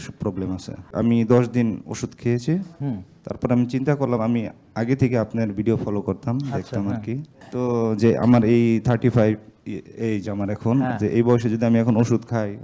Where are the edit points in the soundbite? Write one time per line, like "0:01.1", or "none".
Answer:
0:00.9
0:07.3